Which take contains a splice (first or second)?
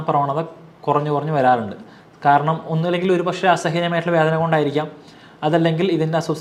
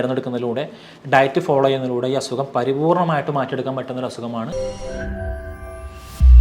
second